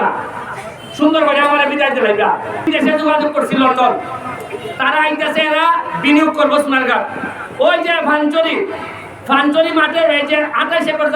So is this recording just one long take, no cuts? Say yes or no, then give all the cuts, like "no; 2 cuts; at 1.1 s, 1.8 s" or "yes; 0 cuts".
no; 1 cut; at 2.6 s